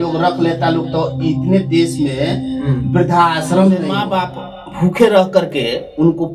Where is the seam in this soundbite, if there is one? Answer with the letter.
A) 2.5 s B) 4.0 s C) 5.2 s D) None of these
B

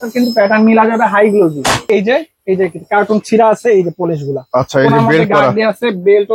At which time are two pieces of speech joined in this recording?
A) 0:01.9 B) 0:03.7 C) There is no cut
A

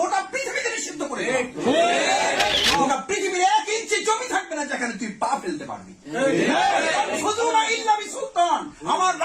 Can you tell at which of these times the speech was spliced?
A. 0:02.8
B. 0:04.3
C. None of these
A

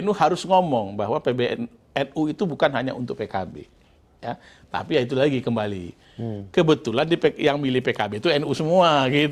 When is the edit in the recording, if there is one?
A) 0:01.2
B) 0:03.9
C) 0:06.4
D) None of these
D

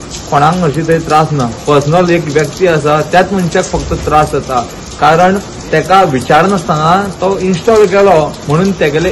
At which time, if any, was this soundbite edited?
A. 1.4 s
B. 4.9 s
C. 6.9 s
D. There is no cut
D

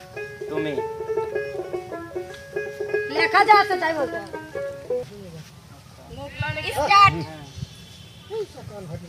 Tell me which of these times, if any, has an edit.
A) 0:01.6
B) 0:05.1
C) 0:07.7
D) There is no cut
B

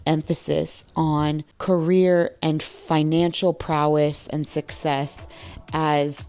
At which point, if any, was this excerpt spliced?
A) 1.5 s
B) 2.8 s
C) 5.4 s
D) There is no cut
A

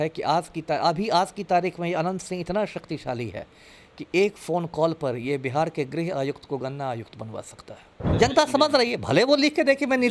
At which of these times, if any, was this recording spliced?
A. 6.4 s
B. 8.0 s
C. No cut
B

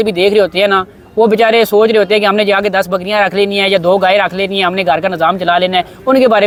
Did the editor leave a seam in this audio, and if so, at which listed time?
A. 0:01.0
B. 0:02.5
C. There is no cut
C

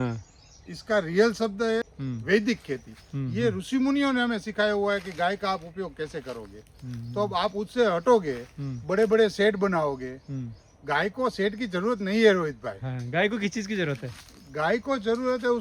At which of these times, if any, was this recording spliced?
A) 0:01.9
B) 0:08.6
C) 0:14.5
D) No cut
A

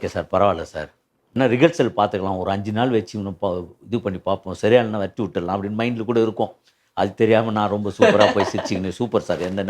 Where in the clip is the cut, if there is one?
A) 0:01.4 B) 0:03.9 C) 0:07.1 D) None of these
A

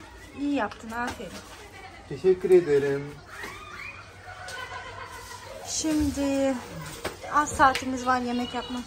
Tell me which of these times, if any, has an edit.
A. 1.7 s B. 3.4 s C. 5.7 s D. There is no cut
D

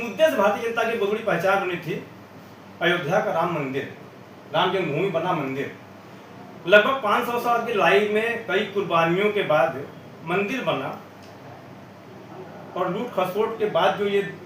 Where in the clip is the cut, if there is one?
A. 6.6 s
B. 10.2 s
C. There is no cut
C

